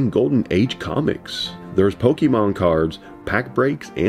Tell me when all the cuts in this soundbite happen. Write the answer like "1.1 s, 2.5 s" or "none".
none